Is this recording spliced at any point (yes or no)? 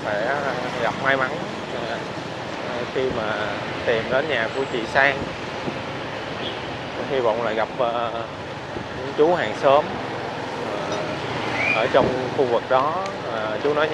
no